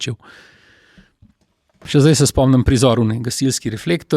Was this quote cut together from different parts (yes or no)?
yes